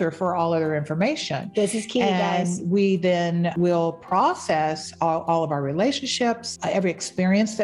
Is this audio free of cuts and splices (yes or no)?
no